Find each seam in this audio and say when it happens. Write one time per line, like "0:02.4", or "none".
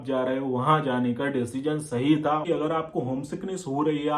0:02.4